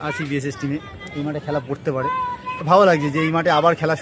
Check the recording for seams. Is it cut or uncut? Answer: uncut